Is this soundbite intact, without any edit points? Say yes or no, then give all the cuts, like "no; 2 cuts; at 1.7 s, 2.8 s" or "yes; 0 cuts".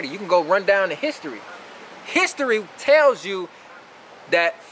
yes; 0 cuts